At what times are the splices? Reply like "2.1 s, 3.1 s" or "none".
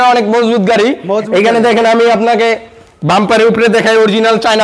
none